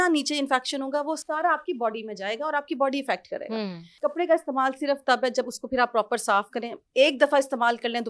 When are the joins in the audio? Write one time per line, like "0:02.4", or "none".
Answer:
0:03.8